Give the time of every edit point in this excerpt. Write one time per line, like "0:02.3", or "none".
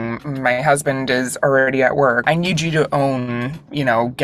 0:02.2